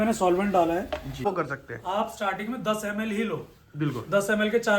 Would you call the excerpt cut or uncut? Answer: cut